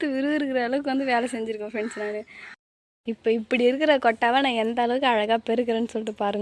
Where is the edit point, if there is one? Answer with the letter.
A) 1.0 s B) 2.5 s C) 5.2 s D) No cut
B